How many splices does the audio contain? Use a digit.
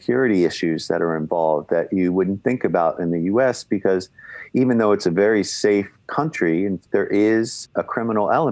2